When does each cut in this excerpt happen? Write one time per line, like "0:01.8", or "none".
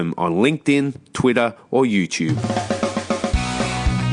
0:02.4